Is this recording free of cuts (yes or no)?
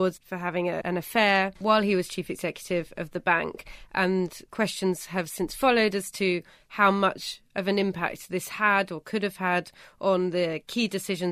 no